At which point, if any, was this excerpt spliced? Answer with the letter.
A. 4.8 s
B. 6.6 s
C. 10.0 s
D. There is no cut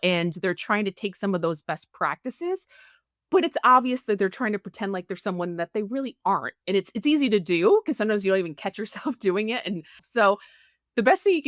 C